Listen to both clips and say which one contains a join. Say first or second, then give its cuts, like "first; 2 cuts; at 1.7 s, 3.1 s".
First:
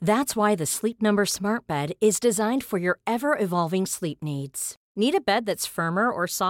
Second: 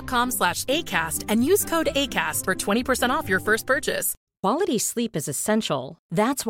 second; 1 cut; at 4.1 s